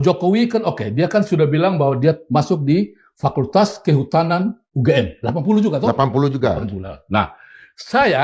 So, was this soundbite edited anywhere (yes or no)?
no